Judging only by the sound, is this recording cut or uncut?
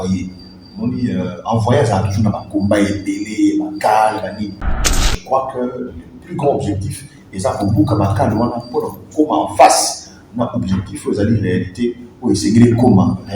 uncut